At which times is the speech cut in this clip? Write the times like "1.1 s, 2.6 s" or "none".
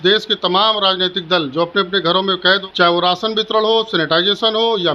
2.6 s